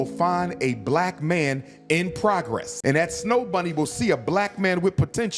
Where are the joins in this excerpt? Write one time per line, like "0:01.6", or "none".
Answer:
0:02.7